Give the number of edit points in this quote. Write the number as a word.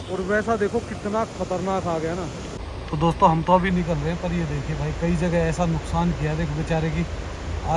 one